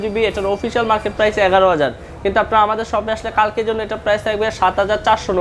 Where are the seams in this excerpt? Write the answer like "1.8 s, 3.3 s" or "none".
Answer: none